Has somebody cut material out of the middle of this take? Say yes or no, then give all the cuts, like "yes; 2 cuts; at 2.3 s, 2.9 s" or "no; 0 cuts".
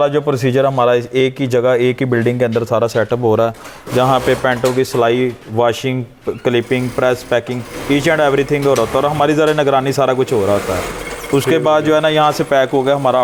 no; 0 cuts